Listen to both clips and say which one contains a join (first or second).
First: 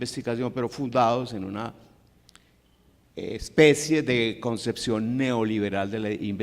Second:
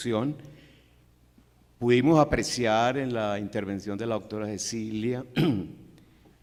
first